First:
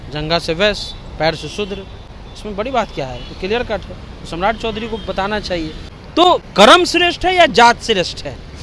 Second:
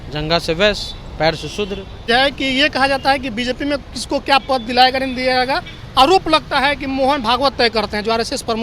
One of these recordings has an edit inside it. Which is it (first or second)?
second